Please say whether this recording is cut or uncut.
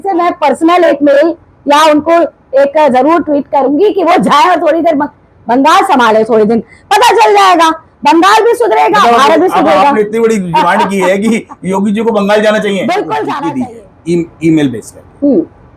cut